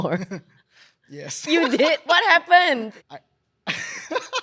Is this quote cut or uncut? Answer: cut